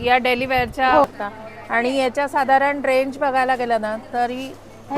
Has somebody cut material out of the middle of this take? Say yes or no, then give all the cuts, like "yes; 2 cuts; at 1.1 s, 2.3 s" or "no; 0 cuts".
yes; 1 cut; at 1.0 s